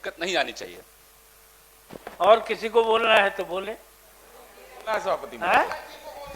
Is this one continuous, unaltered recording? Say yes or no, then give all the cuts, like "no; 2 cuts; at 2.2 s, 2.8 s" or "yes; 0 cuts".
yes; 0 cuts